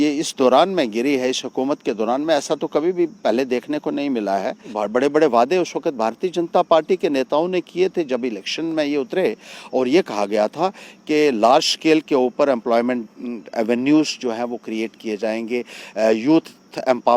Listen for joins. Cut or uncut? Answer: cut